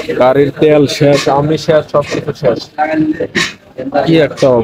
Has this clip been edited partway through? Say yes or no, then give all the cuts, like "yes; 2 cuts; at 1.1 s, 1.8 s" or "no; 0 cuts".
no; 0 cuts